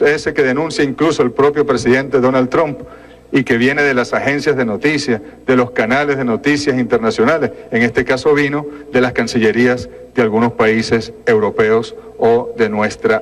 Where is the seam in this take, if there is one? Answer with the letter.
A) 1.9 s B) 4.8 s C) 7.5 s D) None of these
B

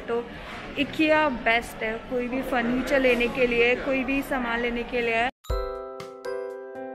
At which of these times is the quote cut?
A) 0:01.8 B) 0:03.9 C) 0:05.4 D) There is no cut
C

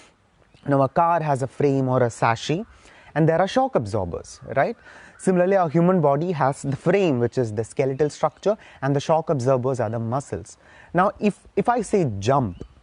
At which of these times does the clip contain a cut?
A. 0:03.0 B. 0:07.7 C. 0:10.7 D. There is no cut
D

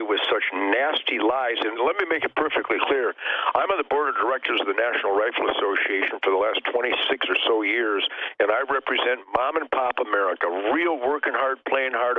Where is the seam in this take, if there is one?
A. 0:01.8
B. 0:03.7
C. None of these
A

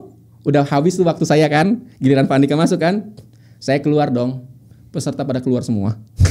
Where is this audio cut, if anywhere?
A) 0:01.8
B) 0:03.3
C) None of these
C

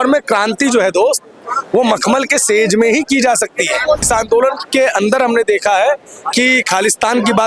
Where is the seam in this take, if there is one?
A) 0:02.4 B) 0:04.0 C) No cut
B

